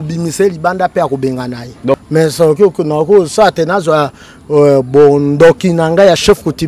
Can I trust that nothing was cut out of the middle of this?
no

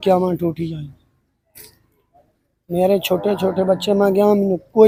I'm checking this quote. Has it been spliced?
no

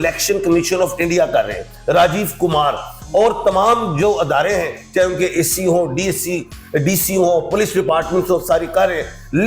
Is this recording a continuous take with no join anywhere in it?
yes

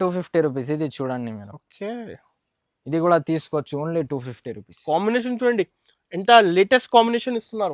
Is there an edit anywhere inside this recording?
no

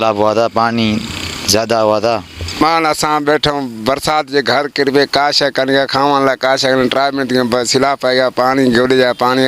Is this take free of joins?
no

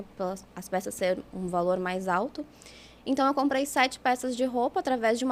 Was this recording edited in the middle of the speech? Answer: no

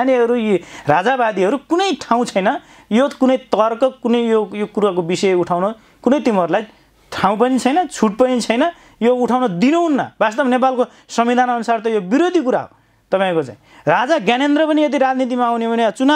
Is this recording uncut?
yes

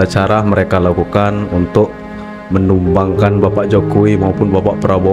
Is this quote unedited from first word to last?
yes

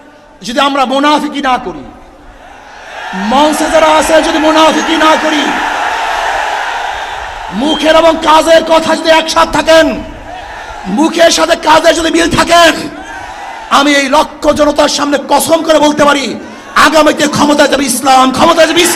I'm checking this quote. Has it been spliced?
no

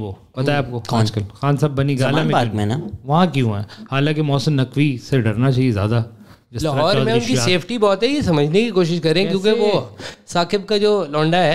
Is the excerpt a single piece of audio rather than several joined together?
yes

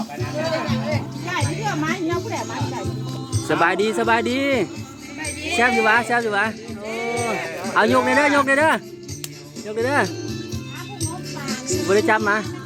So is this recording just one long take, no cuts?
yes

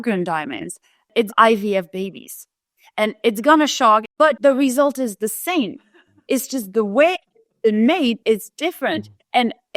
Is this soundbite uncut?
no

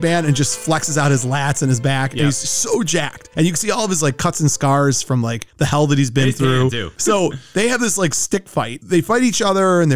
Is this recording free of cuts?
no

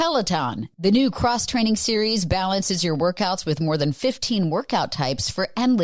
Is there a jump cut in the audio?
no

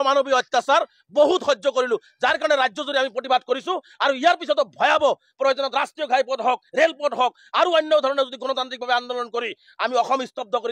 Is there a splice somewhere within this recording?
no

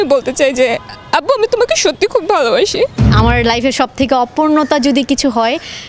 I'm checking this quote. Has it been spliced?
yes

